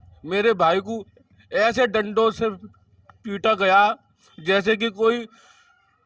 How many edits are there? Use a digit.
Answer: 0